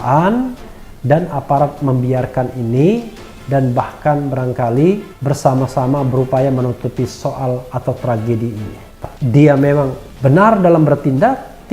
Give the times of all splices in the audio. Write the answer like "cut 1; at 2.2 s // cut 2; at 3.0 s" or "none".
cut 1; at 9.0 s